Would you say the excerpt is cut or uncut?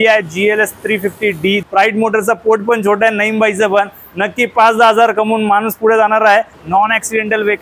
cut